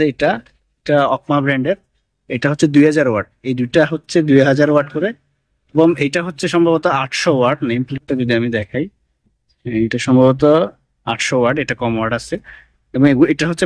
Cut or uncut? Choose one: uncut